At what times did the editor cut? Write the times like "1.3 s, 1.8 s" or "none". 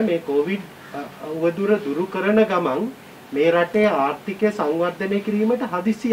none